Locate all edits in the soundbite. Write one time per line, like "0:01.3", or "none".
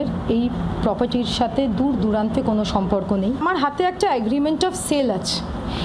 0:03.4